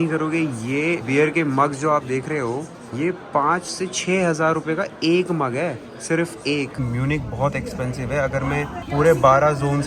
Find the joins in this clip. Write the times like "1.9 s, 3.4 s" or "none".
1.0 s, 2.8 s, 6.8 s, 8.8 s